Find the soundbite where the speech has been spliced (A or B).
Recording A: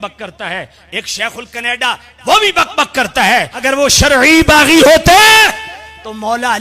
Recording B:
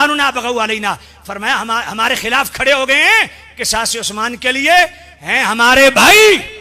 A